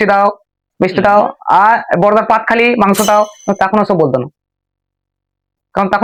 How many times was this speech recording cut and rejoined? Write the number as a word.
zero